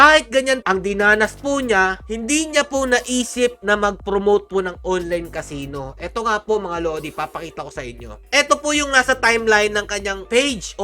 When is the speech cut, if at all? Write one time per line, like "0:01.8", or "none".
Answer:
none